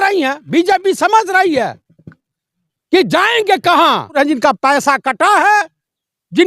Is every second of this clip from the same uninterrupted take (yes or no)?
no